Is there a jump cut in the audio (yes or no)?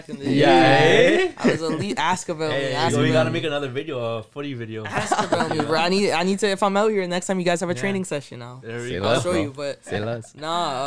no